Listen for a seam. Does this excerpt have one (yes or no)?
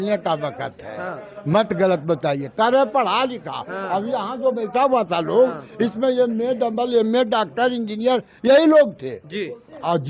no